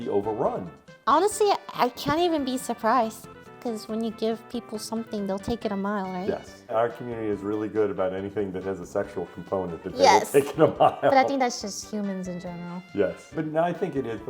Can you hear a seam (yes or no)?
yes